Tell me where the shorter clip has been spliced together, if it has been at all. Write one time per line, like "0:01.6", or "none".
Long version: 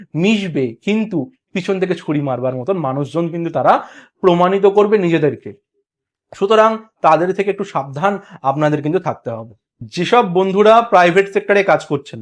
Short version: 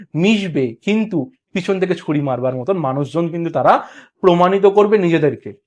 none